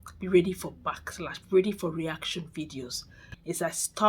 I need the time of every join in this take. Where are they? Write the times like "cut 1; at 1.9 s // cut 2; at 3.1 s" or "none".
cut 1; at 3.0 s